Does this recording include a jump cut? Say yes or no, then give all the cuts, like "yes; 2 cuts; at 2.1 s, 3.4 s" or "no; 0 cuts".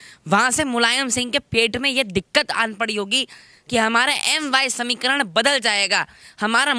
no; 0 cuts